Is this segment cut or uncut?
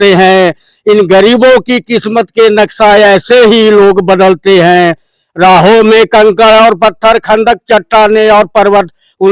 uncut